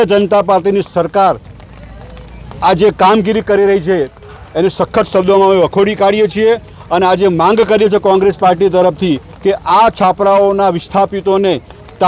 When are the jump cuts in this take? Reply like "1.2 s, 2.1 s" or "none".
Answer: none